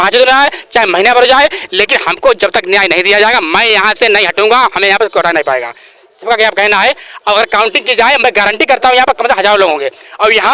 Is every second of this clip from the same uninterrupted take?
yes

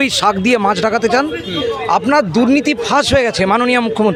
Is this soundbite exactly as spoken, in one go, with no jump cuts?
yes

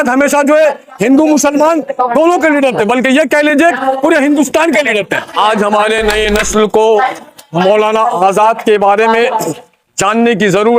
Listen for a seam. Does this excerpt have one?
no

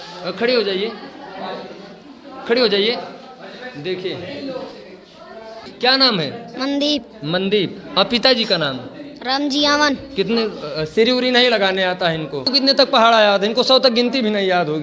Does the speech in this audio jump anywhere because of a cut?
yes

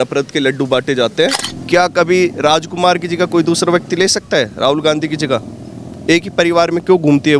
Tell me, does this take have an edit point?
yes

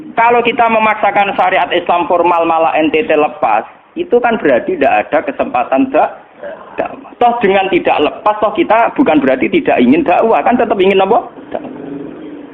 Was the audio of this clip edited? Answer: yes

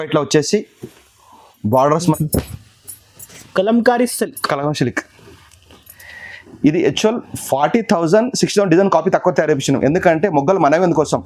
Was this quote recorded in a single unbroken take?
no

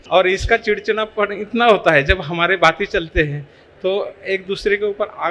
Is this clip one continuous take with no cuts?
yes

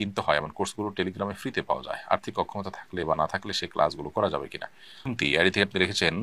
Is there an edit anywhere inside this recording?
yes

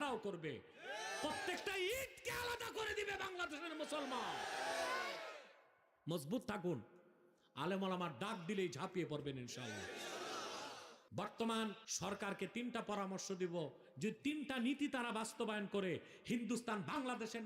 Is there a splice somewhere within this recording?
yes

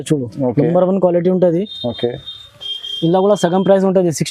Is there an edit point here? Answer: no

